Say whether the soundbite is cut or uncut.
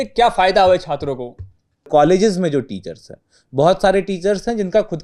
cut